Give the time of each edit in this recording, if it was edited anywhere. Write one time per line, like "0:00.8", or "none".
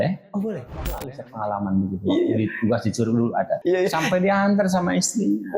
0:01.0
0:03.6